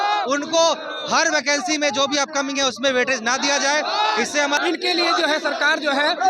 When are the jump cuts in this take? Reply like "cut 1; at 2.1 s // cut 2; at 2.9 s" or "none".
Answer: cut 1; at 4.6 s